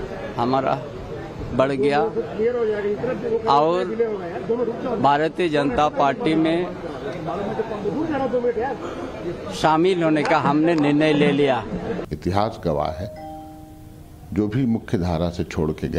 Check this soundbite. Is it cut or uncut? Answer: cut